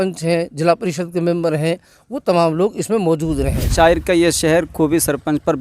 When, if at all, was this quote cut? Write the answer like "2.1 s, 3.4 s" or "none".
3.7 s